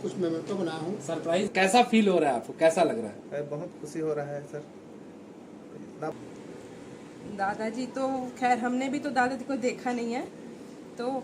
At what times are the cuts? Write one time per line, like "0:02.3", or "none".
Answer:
0:01.5
0:06.1

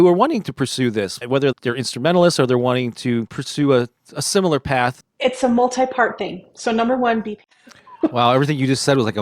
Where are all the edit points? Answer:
0:05.0
0:07.3

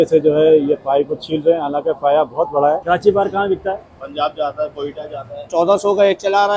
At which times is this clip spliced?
0:02.8
0:05.4

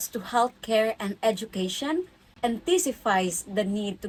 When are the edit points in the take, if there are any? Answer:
none

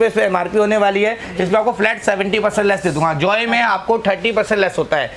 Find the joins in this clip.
none

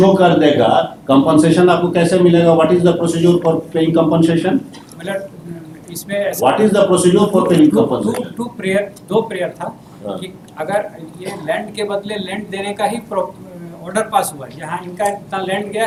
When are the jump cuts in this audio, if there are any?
none

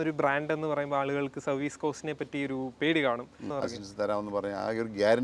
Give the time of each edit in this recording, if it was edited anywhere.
0:03.5

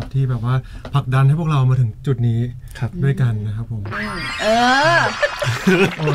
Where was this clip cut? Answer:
0:03.9

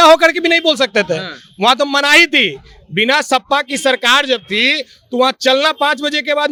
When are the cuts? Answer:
none

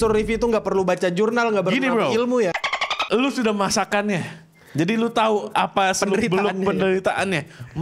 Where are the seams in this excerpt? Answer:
none

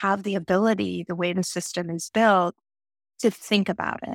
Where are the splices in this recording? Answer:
none

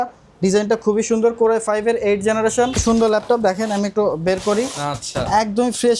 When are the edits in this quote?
0:02.8

